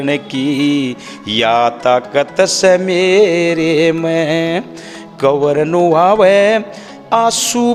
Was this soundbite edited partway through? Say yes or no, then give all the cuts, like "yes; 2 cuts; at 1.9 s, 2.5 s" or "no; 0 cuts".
no; 0 cuts